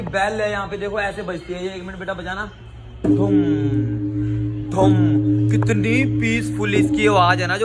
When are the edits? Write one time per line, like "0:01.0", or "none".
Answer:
none